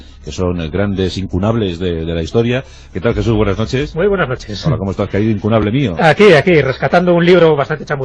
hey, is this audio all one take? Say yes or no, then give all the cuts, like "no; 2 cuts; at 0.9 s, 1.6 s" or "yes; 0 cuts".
yes; 0 cuts